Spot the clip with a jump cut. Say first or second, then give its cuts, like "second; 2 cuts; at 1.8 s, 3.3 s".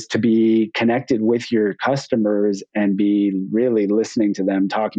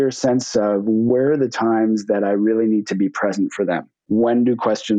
second; 2 cuts; at 1.1 s, 4.0 s